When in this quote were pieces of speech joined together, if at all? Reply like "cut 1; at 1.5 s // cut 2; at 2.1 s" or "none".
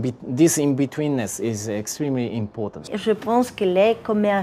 cut 1; at 2.9 s